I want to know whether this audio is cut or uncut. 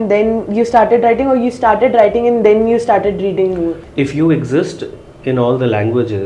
cut